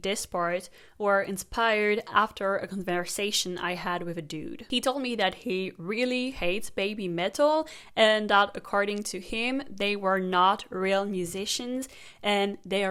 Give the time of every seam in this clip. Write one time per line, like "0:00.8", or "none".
none